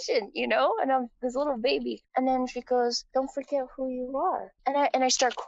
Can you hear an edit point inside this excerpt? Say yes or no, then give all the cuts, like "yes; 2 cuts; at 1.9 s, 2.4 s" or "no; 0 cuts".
yes; 2 cuts; at 3.0 s, 4.6 s